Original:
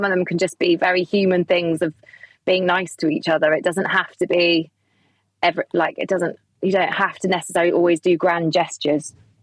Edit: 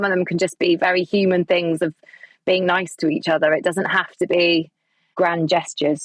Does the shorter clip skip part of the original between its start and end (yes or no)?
yes